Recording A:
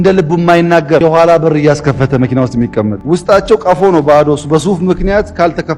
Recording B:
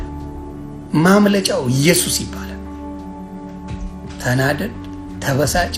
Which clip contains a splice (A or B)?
A